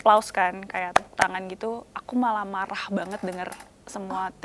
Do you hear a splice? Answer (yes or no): no